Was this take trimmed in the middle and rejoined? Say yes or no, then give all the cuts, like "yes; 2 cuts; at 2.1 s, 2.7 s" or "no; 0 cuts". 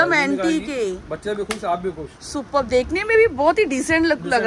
no; 0 cuts